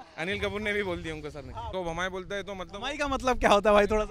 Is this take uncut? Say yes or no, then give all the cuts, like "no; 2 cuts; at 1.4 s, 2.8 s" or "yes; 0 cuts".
no; 1 cut; at 1.7 s